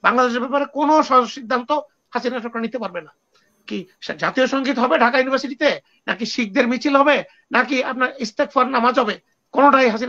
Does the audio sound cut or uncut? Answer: uncut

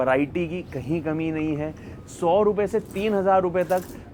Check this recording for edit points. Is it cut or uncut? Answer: uncut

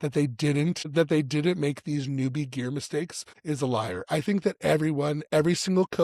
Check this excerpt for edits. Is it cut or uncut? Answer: cut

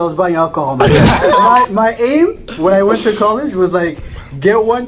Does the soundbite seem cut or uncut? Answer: cut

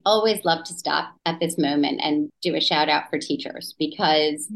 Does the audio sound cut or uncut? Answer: cut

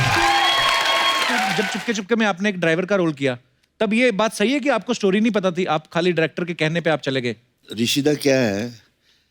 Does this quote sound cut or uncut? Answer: cut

